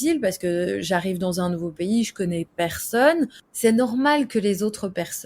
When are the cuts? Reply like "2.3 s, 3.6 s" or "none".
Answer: 3.4 s